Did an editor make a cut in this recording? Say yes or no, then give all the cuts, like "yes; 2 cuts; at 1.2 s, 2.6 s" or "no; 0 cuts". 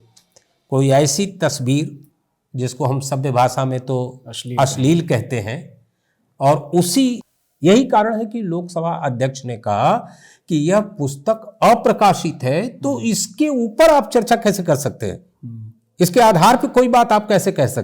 yes; 1 cut; at 7.2 s